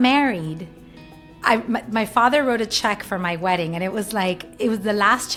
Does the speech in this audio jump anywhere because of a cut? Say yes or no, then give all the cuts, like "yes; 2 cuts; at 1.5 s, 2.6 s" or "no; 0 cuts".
no; 0 cuts